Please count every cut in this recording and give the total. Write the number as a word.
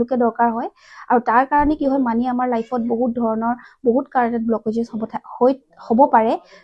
zero